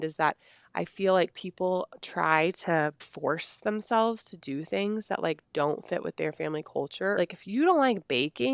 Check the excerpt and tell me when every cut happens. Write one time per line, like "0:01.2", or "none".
0:03.1
0:07.2

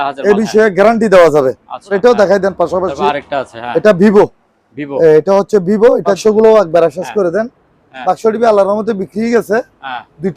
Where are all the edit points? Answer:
0:01.9
0:06.2

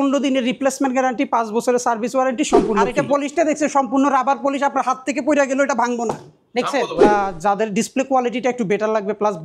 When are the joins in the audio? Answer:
0:02.8
0:07.0

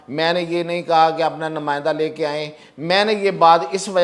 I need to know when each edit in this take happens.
none

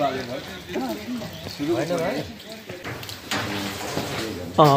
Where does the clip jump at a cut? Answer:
0:02.9

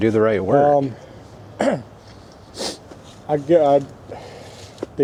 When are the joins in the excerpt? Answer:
none

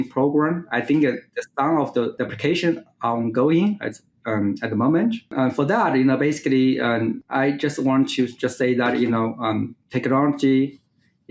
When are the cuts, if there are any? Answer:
0:02.1
0:05.3
0:07.2

